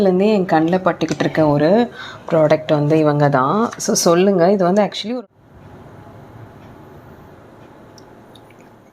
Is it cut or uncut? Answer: cut